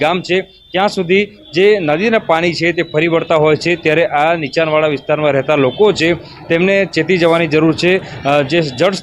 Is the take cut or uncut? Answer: cut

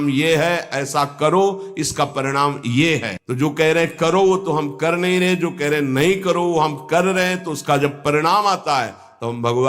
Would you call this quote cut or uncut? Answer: cut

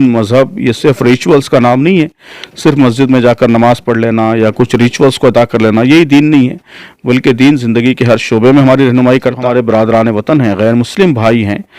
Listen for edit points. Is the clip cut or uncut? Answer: cut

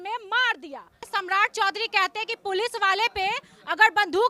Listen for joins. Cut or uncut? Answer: cut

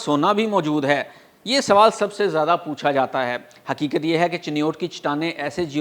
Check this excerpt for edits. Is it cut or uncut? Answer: uncut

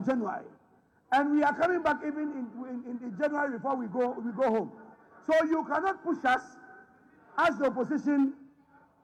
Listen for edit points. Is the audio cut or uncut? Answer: uncut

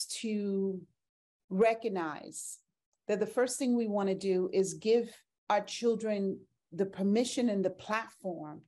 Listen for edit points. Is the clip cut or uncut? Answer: uncut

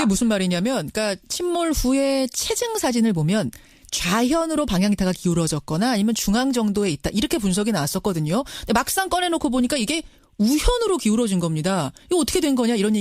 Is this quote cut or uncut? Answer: uncut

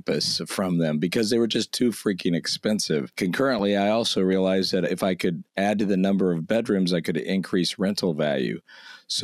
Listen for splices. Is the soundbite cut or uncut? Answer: cut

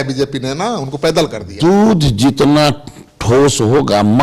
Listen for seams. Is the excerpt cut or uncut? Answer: cut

